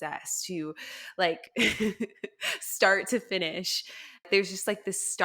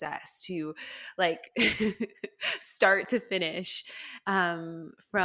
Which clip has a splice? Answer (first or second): first